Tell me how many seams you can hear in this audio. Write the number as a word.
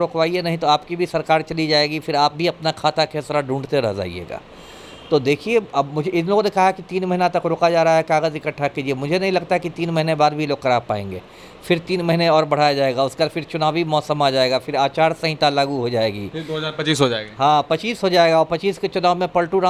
zero